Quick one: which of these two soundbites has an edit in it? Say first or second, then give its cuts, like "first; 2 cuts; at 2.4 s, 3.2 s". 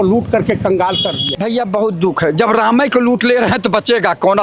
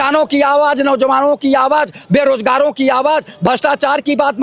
first; 1 cut; at 1.2 s